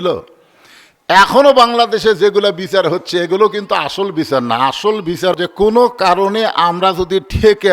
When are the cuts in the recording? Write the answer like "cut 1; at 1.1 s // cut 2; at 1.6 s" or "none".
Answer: cut 1; at 5.3 s